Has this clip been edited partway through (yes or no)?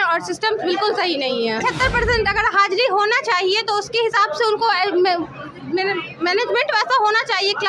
yes